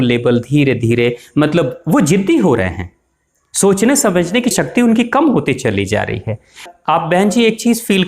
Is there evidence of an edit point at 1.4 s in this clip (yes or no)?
no